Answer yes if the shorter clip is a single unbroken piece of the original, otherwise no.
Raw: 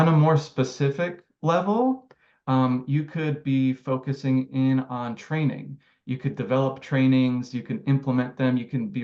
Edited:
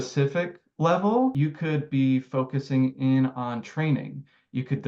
no